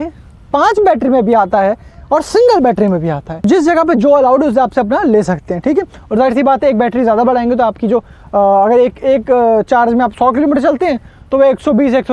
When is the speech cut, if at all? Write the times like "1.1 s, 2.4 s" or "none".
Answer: none